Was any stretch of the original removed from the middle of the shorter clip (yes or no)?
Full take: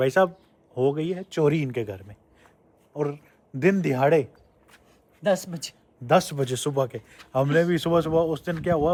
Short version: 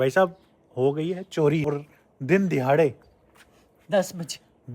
yes